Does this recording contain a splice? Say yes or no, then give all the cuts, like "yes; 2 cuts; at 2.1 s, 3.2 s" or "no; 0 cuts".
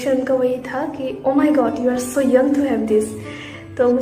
no; 0 cuts